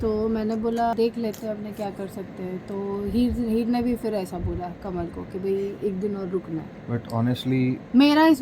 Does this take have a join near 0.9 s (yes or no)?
yes